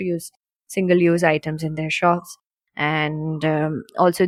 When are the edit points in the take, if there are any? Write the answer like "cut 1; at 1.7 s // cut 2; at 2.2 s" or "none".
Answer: none

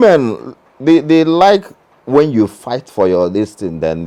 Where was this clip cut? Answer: none

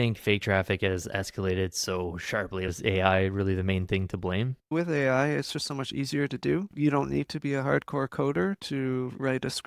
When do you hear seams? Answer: cut 1; at 2.7 s // cut 2; at 4.7 s // cut 3; at 6.7 s

